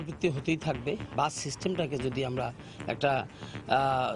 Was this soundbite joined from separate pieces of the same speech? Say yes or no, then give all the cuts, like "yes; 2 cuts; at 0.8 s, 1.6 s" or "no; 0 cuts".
yes; 1 cut; at 1.1 s